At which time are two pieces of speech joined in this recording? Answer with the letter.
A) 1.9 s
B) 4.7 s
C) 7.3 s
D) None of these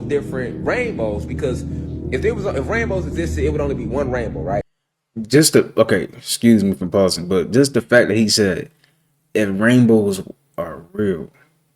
B